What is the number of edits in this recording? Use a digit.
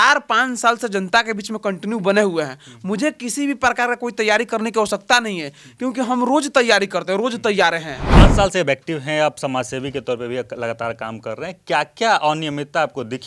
1